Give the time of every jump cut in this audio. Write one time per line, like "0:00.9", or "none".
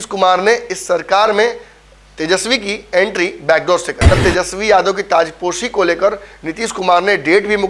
0:04.0